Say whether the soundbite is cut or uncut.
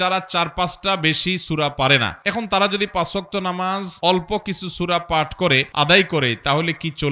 cut